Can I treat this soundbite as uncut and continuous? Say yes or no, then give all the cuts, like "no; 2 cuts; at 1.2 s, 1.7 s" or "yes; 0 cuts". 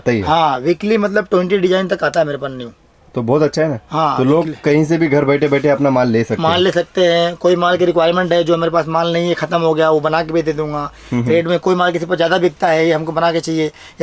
yes; 0 cuts